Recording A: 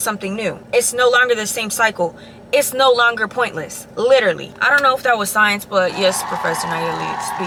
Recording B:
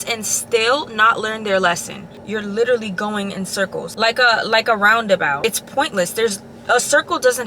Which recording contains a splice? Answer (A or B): B